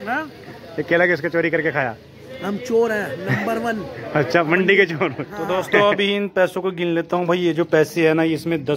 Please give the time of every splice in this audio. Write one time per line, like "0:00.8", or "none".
0:05.6